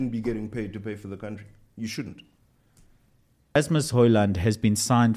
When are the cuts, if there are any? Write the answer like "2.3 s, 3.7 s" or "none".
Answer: 3.6 s